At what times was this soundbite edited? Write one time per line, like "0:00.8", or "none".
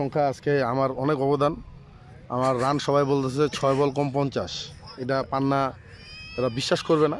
none